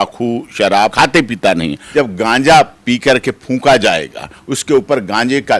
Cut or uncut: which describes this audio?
cut